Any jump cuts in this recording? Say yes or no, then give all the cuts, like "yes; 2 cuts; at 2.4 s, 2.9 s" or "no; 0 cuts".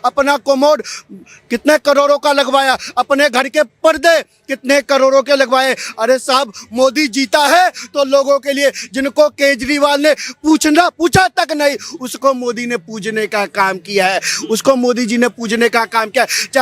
no; 0 cuts